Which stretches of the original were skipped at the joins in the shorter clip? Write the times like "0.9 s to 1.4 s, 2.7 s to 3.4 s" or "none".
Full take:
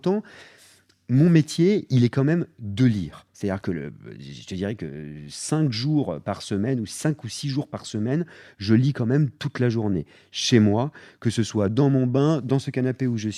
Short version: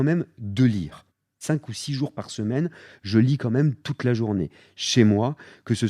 3.4 s to 6.8 s